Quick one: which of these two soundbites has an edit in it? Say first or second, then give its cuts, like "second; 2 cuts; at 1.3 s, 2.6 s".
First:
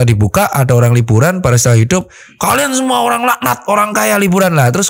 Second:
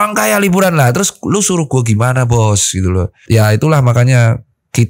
second; 1 cut; at 3.2 s